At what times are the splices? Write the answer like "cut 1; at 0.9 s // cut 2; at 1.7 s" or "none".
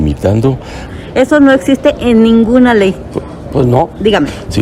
cut 1; at 0.9 s